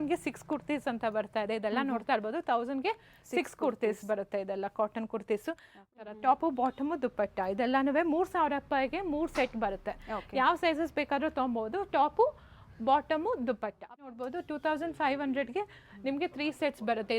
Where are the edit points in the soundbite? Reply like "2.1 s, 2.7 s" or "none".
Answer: 5.8 s, 14.0 s